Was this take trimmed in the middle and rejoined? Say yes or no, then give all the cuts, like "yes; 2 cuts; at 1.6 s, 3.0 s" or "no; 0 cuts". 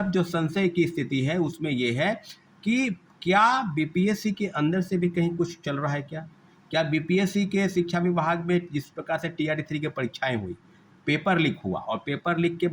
no; 0 cuts